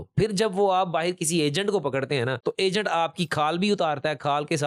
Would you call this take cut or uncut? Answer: uncut